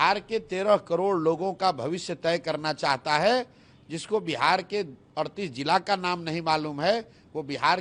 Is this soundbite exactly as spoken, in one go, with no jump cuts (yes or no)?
yes